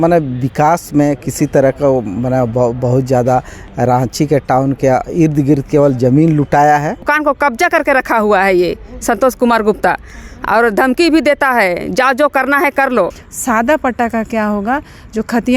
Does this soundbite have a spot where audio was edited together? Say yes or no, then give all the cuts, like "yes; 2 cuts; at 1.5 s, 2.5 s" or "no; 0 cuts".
yes; 2 cuts; at 7.1 s, 13.3 s